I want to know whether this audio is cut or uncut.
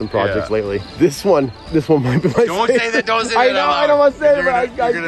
uncut